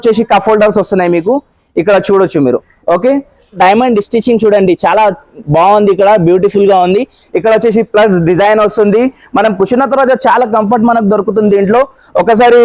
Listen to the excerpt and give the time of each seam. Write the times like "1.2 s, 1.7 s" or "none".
3.6 s

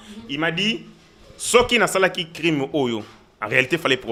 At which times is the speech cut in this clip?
none

